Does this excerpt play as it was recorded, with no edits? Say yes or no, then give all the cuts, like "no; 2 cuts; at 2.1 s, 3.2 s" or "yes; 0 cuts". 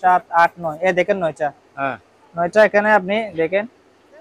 yes; 0 cuts